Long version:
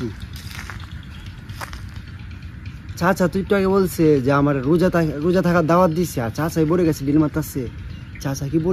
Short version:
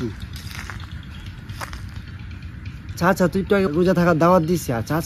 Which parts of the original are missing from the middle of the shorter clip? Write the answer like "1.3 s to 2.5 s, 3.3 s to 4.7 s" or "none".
3.7 s to 5.1 s